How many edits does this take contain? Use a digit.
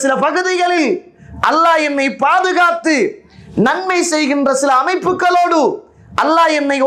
0